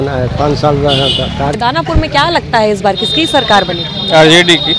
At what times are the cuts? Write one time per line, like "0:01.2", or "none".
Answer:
0:01.6